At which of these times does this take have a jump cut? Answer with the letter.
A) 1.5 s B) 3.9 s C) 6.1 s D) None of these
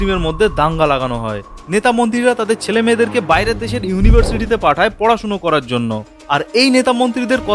A